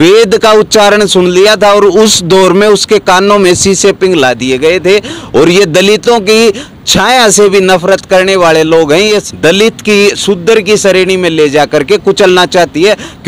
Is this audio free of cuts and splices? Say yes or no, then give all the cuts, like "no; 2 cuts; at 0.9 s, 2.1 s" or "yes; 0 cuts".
no; 1 cut; at 9.2 s